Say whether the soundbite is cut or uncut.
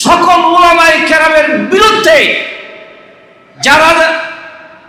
uncut